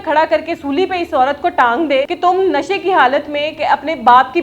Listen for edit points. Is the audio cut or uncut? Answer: cut